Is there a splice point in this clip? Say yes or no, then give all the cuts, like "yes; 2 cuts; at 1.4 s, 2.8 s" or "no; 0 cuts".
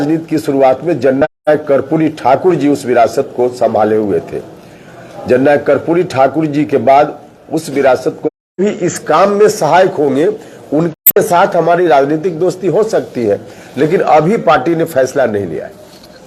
no; 0 cuts